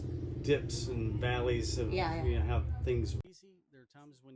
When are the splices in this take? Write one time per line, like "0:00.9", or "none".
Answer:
0:03.2